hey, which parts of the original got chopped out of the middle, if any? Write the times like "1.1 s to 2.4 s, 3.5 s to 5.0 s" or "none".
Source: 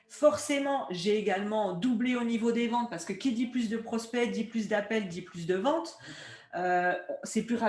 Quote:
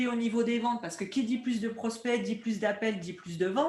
none